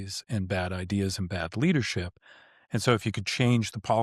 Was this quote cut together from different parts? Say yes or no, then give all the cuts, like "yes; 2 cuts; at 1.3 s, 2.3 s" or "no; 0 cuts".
no; 0 cuts